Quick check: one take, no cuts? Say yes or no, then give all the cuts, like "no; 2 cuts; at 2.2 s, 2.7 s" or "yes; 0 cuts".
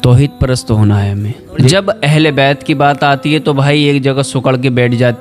no; 1 cut; at 1.7 s